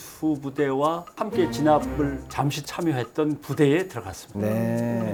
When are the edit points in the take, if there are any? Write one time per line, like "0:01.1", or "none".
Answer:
none